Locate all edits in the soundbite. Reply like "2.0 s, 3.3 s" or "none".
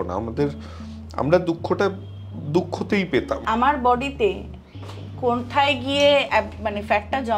3.4 s